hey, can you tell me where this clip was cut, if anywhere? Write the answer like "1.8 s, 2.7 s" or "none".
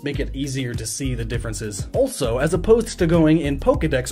1.8 s

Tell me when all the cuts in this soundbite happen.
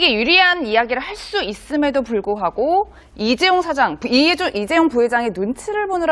none

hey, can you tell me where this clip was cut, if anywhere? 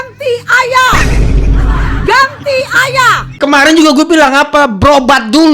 3.3 s

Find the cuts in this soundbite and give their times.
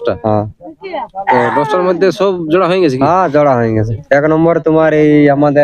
4.0 s

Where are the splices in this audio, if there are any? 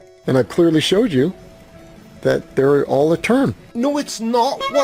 none

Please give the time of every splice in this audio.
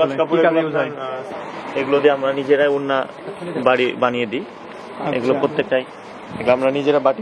1.2 s

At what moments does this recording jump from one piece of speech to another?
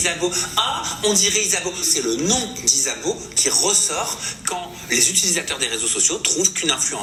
none

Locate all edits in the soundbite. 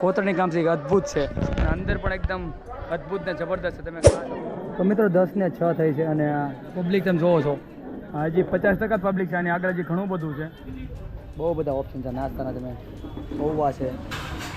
4.0 s, 10.8 s

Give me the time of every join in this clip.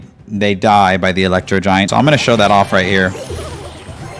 1.9 s

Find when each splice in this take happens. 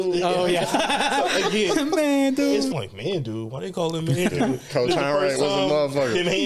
2.7 s

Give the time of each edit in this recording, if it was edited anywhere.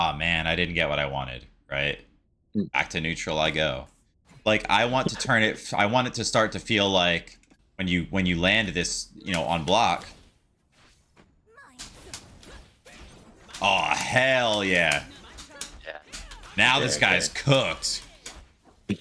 none

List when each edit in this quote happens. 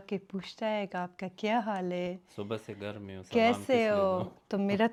none

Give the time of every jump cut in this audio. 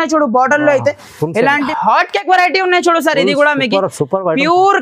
1.7 s

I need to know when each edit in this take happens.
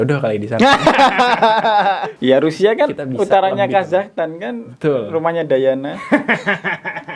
2.1 s

